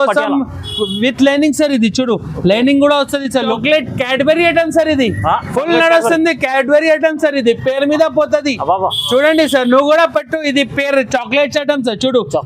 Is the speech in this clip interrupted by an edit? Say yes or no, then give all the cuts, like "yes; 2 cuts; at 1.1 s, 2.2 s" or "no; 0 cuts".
yes; 1 cut; at 3.5 s